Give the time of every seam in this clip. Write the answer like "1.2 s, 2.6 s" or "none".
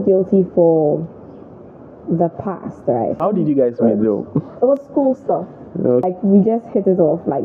3.2 s, 6.1 s